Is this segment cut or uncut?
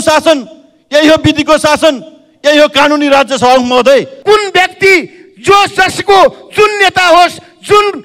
cut